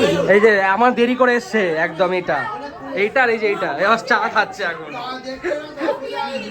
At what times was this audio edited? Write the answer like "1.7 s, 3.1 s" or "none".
none